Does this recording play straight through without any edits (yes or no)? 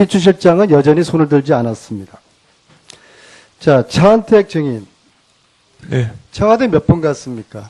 no